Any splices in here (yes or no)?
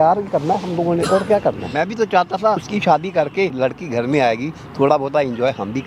yes